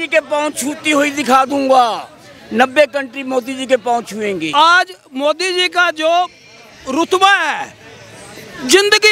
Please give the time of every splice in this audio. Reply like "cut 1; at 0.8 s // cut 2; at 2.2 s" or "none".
cut 1; at 4.5 s